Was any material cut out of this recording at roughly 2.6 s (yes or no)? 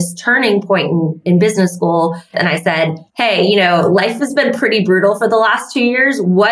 yes